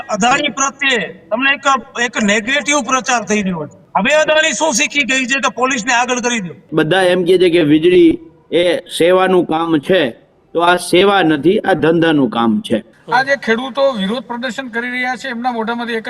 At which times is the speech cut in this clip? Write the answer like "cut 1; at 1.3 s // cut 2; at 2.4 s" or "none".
cut 1; at 3.8 s // cut 2; at 6.7 s // cut 3; at 12.9 s